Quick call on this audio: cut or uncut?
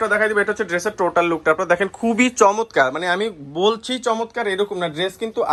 uncut